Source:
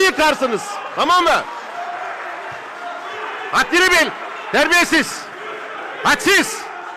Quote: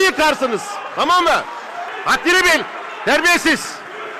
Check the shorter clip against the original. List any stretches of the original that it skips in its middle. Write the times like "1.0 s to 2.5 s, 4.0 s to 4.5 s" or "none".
1.9 s to 3.4 s